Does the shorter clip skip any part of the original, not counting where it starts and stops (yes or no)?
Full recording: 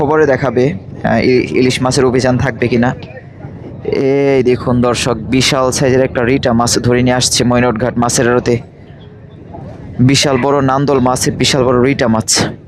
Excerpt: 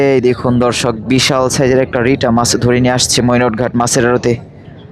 no